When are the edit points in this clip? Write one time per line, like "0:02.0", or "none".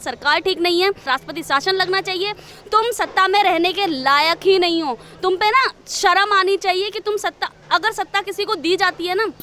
0:01.0